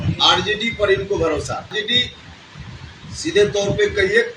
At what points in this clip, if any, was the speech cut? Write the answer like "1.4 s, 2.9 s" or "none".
none